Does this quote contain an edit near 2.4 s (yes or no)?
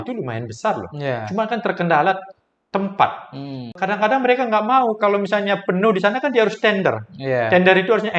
no